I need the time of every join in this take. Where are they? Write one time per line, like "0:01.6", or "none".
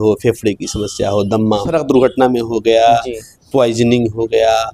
0:01.7